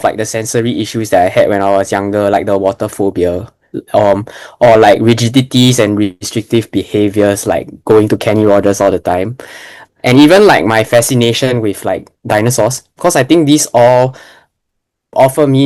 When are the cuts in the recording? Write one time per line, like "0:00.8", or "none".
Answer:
none